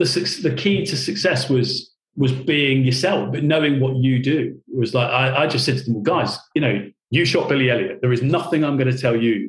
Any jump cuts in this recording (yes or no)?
no